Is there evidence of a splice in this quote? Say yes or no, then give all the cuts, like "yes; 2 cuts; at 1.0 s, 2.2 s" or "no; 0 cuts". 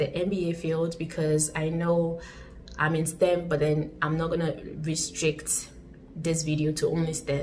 no; 0 cuts